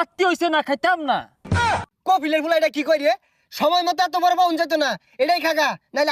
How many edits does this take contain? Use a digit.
1